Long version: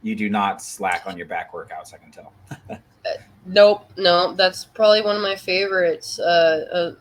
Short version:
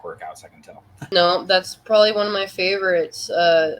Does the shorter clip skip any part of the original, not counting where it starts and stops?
yes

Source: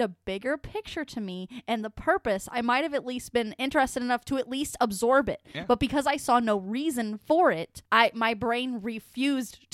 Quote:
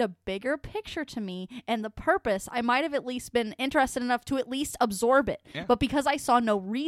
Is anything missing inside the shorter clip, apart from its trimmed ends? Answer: no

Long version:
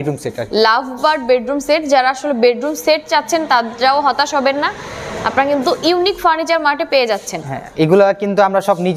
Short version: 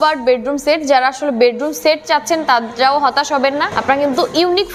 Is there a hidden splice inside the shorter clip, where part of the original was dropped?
yes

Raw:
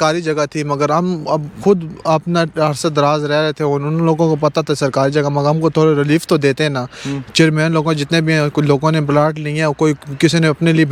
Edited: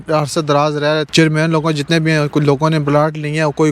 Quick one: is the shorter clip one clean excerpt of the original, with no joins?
no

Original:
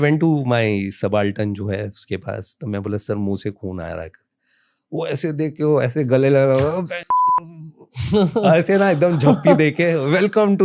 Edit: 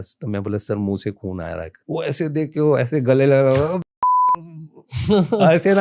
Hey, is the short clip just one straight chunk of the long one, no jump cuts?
no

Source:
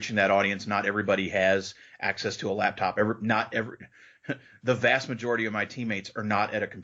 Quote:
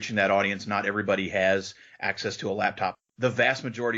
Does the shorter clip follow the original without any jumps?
no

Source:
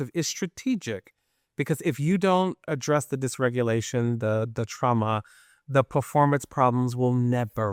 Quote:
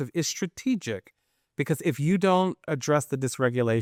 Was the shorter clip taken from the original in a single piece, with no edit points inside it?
yes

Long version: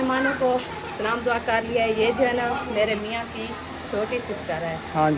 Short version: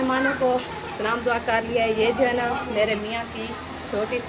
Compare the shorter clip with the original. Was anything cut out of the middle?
no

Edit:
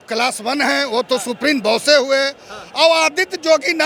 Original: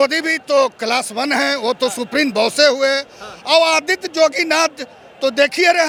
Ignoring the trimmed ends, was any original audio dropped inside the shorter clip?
no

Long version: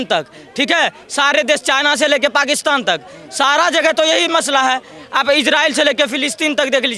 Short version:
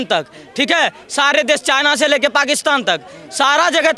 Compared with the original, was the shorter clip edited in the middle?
no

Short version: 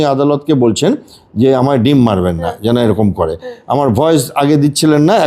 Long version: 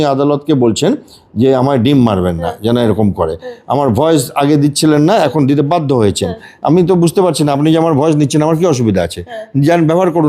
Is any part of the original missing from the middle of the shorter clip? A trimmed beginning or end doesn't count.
no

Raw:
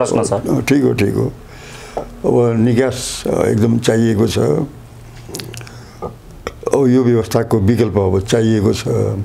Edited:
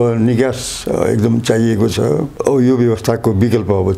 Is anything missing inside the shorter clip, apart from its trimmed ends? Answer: yes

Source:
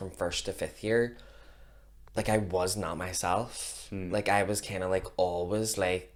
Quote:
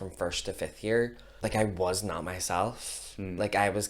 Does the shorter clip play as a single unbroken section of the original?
no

